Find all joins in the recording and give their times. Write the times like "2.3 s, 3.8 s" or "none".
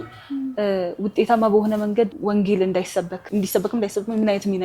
2.1 s, 3.2 s